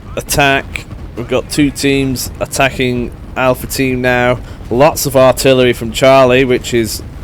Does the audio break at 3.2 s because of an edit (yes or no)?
no